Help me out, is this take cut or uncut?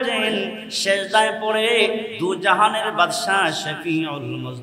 uncut